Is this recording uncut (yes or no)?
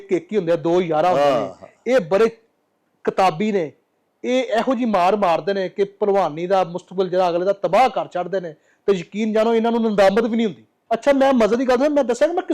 yes